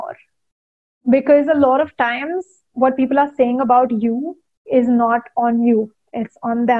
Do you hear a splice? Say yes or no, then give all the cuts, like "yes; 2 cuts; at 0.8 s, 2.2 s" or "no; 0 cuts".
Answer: no; 0 cuts